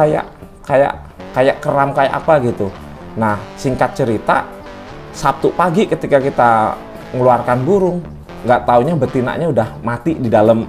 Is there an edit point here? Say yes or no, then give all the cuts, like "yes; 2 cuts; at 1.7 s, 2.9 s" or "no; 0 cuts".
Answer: no; 0 cuts